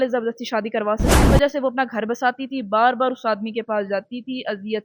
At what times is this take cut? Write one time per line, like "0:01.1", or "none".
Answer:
0:01.3